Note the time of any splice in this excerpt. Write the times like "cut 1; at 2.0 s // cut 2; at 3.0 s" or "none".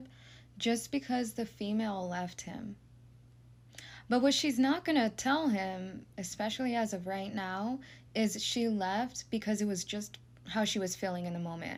none